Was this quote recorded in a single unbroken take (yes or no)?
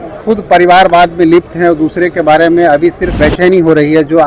no